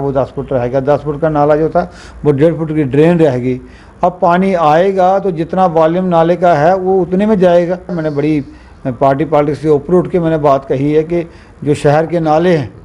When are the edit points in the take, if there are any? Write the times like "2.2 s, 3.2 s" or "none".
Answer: 8.0 s